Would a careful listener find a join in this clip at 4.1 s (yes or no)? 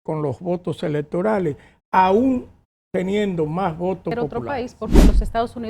yes